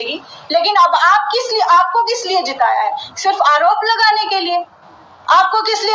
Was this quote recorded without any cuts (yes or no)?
yes